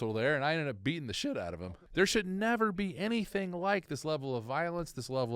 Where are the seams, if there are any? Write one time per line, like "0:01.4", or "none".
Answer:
0:01.6